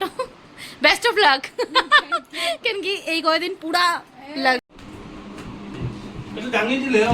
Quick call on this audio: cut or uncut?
cut